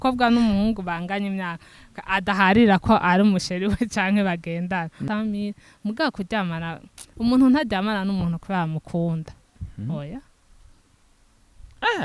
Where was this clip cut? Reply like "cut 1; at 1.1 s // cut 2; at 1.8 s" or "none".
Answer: cut 1; at 5.0 s